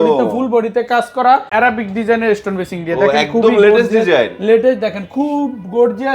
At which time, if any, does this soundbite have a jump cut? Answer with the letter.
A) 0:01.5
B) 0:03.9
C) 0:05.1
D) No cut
A